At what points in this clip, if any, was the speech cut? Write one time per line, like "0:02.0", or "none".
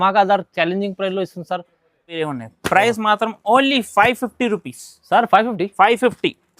0:02.1